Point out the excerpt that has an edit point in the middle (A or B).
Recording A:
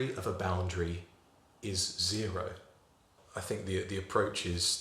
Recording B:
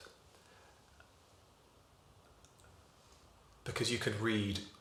A